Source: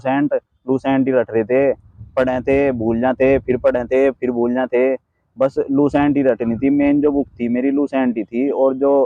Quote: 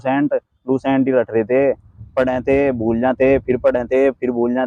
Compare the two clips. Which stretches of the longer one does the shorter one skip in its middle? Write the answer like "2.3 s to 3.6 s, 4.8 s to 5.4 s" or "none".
none